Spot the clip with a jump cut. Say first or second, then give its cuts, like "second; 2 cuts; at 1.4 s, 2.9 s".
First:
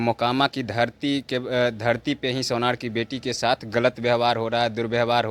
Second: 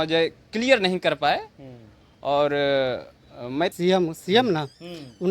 second; 1 cut; at 3.7 s